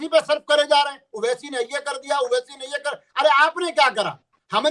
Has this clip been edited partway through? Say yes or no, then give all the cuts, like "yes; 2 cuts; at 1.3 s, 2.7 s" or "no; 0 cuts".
no; 0 cuts